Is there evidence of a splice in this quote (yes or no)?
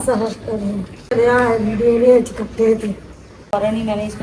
yes